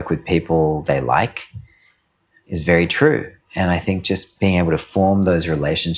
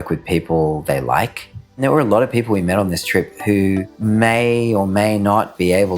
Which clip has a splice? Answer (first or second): second